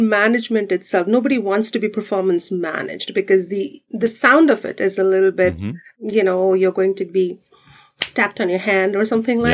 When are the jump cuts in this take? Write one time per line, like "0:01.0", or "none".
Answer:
0:03.8